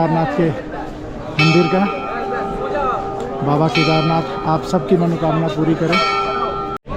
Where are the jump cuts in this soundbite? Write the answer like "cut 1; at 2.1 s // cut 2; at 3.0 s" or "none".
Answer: none